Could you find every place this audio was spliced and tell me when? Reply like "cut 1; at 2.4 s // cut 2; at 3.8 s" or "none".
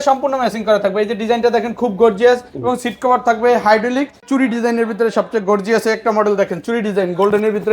cut 1; at 4.2 s